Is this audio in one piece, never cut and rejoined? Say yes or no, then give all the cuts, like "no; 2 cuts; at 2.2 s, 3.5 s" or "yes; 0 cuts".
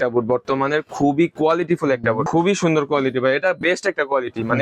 no; 1 cut; at 2.3 s